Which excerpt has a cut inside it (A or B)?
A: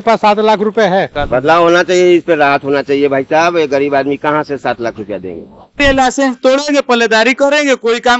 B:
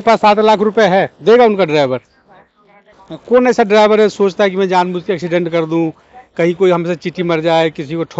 A